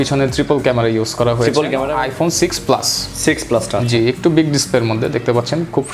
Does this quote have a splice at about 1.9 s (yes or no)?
yes